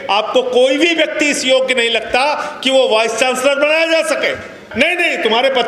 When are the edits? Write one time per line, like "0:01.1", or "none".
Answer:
0:04.7